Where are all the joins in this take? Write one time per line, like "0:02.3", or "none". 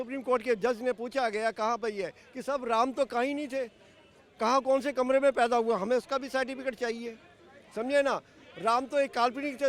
none